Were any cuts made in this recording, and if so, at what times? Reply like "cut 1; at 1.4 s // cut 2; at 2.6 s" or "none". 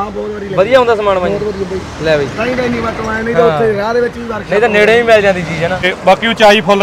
cut 1; at 5.9 s

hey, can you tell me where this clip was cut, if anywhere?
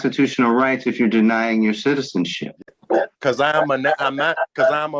none

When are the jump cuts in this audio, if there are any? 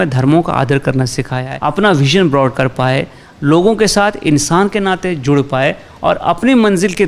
cut 1; at 1.4 s

